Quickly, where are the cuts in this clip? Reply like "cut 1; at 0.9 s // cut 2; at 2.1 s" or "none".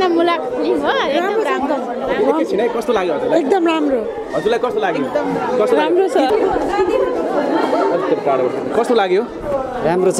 cut 1; at 6.3 s